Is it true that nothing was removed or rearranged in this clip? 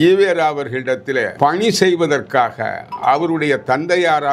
no; 1 cut; at 1.3 s

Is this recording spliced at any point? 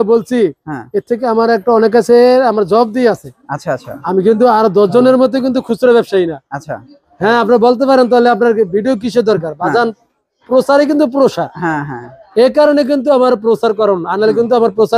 no; 0 cuts

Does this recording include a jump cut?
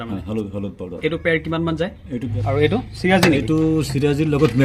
yes; 1 cut; at 2.3 s

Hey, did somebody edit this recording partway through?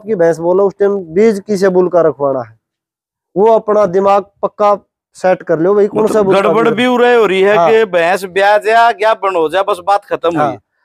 no; 0 cuts

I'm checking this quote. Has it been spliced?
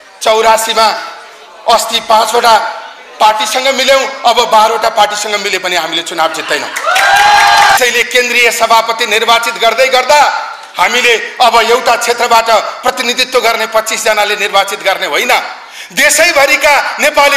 yes; 1 cut; at 7.8 s

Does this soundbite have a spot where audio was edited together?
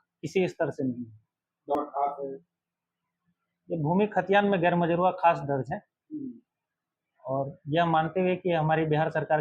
yes; 1 cut; at 1.8 s

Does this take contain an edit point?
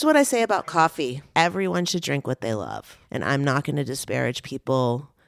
yes; 2 cuts; at 1.2 s, 3.0 s

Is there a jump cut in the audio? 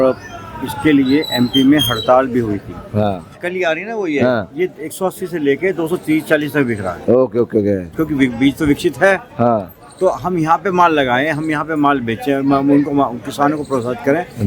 yes; 2 cuts; at 3.2 s, 7.9 s

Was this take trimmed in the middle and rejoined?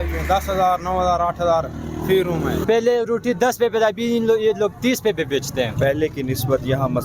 yes; 2 cuts; at 2.6 s, 5.7 s

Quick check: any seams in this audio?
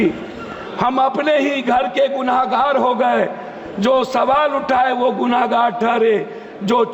no; 0 cuts

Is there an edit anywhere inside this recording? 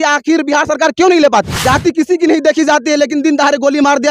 yes; 1 cut; at 1.5 s

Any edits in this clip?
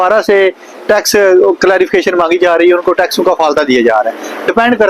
no; 0 cuts

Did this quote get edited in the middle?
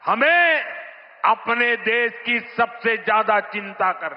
no; 0 cuts

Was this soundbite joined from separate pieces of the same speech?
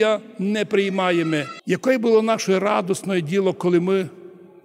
yes; 1 cut; at 1.5 s

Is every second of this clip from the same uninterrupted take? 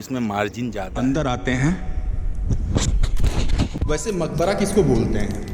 no; 1 cut; at 0.9 s

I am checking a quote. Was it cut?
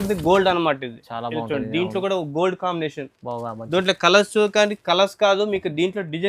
no; 0 cuts

